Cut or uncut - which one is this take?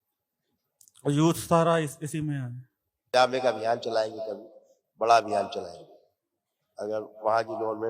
cut